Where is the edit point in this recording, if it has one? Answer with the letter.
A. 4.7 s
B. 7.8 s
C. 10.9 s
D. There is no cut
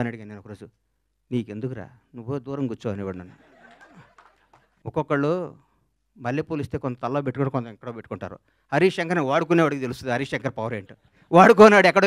A